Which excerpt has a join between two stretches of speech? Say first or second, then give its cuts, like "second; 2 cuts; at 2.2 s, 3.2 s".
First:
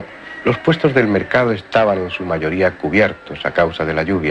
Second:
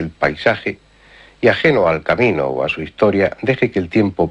first; 1 cut; at 2.5 s